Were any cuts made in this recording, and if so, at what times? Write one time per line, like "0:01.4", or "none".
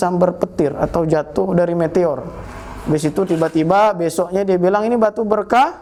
none